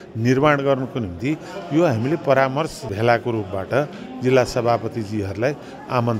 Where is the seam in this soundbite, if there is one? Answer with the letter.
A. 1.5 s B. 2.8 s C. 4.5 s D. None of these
B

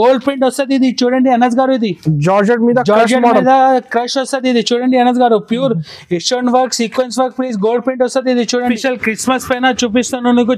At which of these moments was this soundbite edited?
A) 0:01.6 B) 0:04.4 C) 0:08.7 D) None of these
C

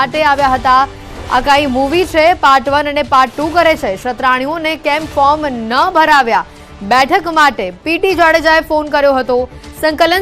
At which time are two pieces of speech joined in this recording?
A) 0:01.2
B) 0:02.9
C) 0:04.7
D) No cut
C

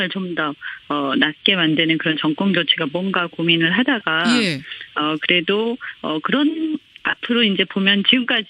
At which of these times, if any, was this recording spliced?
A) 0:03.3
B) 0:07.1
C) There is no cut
A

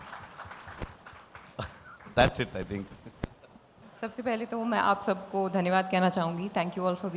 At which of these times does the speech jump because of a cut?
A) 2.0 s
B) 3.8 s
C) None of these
B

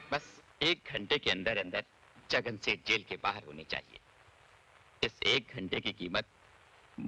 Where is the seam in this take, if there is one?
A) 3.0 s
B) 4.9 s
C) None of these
C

